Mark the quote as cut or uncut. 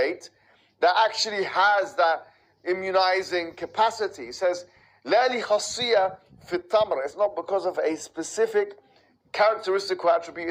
uncut